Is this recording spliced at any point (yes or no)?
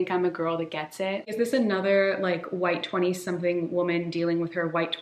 yes